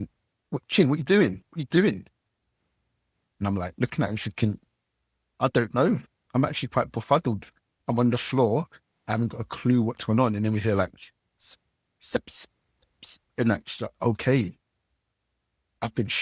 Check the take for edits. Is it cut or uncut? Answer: uncut